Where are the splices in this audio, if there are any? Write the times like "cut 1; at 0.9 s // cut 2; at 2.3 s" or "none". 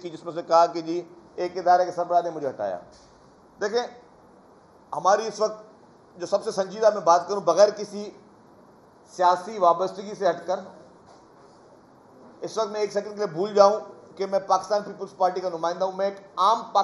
none